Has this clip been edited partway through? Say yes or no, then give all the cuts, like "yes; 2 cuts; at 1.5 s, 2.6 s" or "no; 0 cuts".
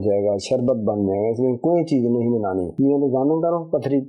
yes; 1 cut; at 2.7 s